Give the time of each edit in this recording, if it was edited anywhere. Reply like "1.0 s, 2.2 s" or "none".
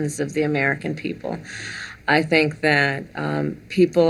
none